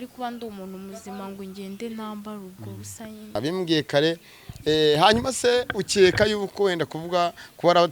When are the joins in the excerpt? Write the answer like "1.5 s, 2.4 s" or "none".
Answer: 3.4 s